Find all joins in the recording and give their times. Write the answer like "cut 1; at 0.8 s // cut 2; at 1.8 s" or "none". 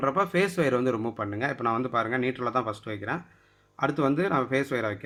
none